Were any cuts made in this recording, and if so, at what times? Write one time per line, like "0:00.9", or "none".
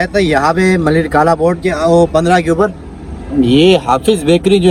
none